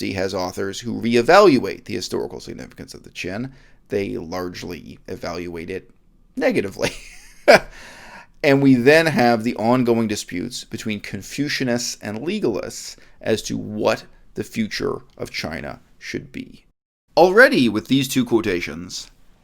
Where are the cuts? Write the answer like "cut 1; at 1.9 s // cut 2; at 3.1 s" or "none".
cut 1; at 16.7 s

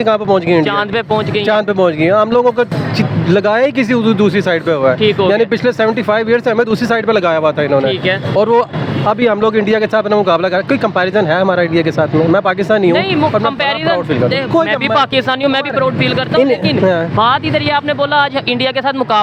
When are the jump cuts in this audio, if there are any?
none

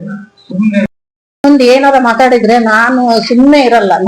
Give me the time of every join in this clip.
cut 1; at 1.4 s

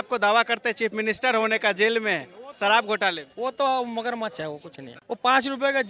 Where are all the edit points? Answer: none

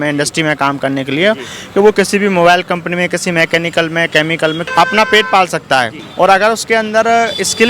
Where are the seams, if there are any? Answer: cut 1; at 4.6 s // cut 2; at 6.0 s

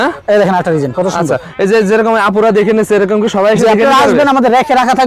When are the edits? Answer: none

